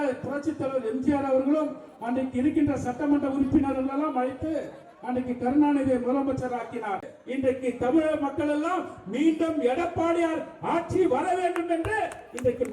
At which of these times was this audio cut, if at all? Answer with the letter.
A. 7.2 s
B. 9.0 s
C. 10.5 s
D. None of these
A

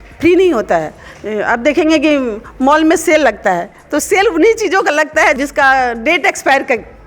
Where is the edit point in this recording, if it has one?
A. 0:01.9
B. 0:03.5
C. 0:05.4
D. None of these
C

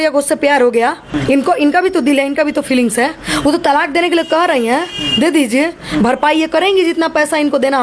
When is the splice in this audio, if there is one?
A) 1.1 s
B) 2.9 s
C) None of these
A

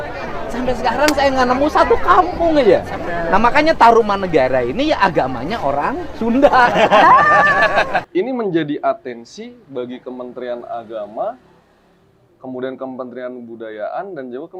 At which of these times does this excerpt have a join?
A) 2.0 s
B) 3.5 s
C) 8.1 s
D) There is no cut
C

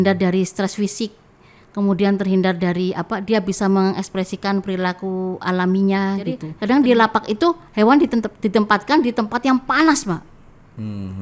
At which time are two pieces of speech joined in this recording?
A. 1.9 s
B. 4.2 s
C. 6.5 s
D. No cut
C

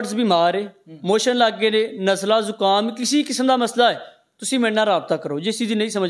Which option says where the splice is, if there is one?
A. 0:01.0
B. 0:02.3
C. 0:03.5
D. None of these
D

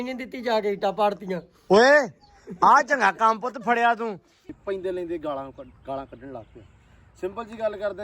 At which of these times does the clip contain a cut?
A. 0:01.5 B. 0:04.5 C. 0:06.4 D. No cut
B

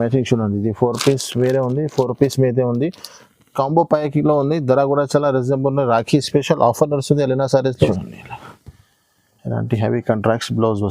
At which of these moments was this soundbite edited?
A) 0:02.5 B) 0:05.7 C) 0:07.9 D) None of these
C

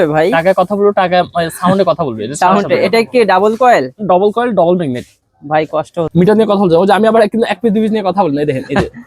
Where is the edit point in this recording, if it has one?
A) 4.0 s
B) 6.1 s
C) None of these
B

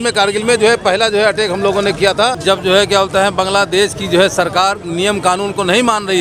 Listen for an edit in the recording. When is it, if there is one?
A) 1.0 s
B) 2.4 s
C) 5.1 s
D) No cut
B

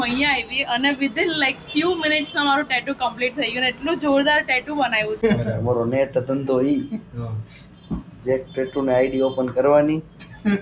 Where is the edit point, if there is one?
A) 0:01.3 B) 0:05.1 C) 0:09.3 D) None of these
B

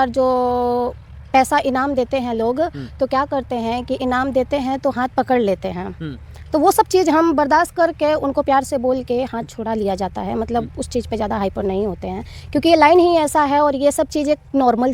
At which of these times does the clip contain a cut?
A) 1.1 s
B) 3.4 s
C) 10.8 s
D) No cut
D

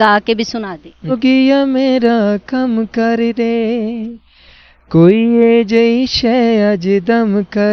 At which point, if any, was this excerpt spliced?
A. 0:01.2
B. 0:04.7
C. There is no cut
A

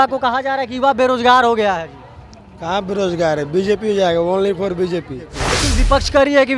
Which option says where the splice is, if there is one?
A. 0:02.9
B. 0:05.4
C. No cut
B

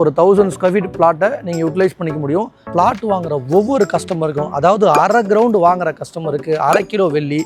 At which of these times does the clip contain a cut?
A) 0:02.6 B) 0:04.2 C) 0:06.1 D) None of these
A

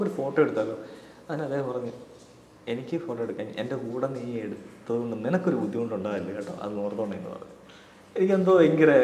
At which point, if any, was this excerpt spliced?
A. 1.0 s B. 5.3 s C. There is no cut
C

